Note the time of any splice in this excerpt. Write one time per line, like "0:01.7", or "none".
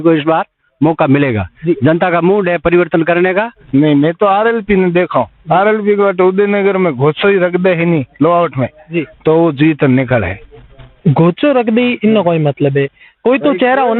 0:03.6